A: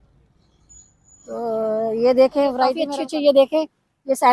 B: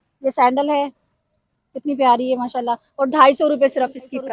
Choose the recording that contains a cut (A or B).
A